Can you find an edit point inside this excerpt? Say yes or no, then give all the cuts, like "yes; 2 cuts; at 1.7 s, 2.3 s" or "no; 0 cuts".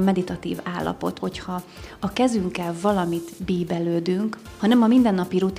yes; 2 cuts; at 1.2 s, 4.5 s